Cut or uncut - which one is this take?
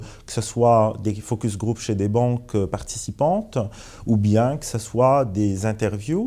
uncut